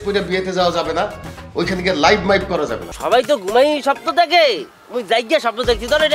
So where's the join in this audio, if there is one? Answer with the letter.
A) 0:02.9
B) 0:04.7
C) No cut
A